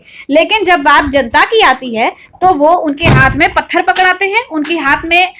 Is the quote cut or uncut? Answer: uncut